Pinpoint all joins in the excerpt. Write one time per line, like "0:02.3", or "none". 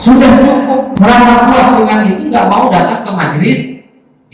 0:00.9